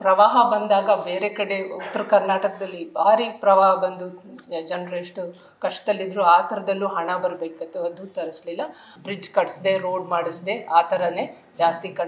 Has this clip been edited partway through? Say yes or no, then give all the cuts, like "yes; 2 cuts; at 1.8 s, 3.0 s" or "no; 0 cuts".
yes; 1 cut; at 8.9 s